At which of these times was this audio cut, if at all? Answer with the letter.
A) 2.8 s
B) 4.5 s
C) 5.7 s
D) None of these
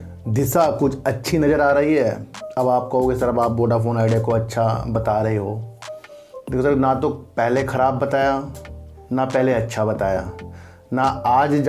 D